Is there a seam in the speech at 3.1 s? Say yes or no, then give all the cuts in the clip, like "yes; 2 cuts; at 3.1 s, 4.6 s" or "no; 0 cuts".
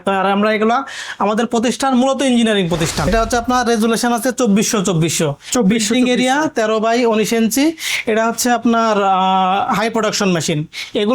yes; 1 cut; at 3.1 s